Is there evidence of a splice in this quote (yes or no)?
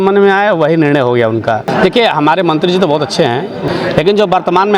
yes